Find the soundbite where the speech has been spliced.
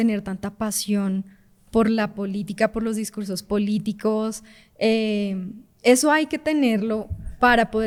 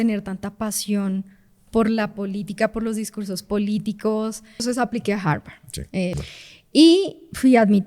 second; 2 cuts; at 4.6 s, 6.2 s

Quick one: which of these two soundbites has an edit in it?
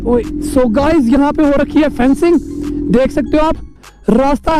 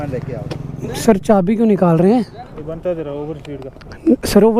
second; 1 cut; at 2.4 s

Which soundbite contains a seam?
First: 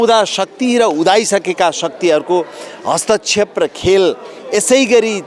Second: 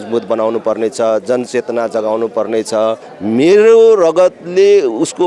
second; 1 cut; at 3.1 s

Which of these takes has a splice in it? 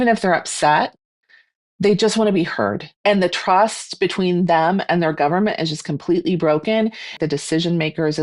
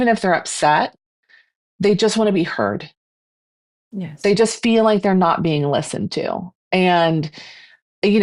first; 2 cuts; at 2.9 s, 7.1 s

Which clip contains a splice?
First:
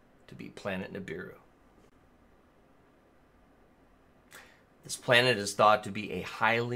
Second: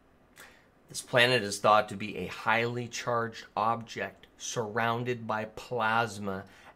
first; 1 cut; at 1.4 s

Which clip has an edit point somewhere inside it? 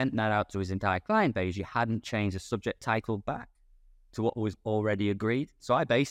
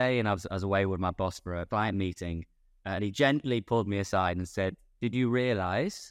second; 2 cuts; at 1.6 s, 4.9 s

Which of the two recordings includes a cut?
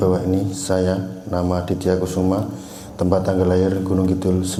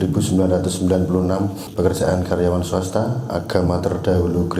second; 1 cut; at 1.6 s

